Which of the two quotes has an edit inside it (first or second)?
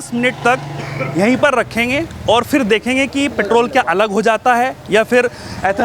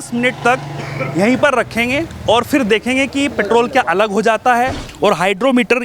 second